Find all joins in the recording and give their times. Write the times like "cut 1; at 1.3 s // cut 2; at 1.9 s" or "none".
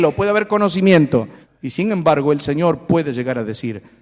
cut 1; at 1.4 s